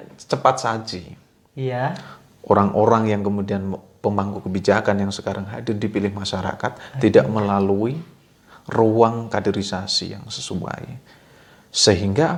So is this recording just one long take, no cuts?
yes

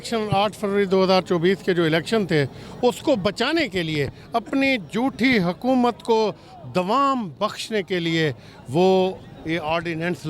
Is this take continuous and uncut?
yes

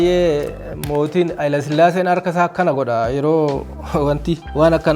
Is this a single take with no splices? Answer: yes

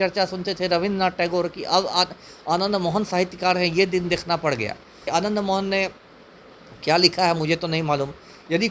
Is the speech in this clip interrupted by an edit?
yes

